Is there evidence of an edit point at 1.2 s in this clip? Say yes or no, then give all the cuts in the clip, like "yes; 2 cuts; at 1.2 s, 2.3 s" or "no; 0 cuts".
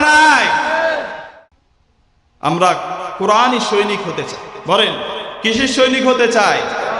yes; 1 cut; at 1.2 s